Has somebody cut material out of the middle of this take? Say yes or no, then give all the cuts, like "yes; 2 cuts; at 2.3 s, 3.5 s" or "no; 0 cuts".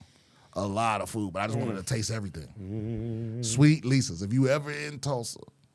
no; 0 cuts